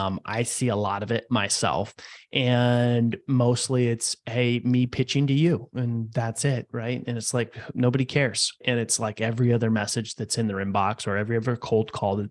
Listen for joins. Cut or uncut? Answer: cut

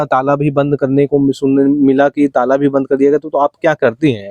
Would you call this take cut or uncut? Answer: uncut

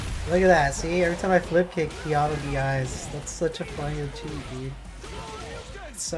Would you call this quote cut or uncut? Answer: uncut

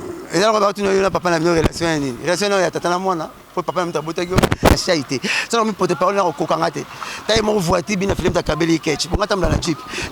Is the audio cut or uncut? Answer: cut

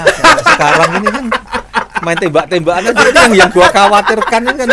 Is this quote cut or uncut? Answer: uncut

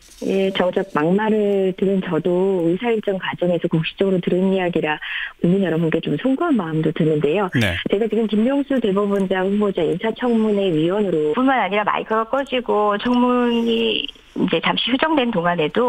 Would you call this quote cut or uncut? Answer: uncut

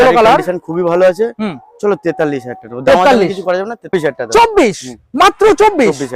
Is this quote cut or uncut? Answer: cut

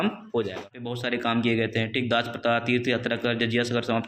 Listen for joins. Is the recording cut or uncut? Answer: cut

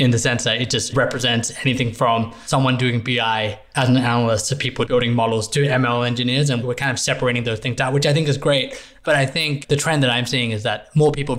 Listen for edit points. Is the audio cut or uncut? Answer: cut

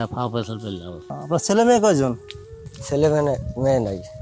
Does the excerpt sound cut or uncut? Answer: cut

